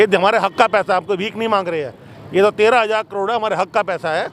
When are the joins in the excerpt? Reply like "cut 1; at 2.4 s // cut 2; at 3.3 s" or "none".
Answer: none